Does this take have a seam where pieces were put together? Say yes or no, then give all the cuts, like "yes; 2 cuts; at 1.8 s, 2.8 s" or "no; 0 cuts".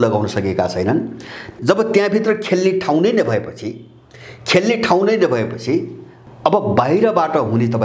yes; 2 cuts; at 1.5 s, 6.1 s